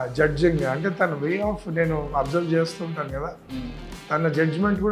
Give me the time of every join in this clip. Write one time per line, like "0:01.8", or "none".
none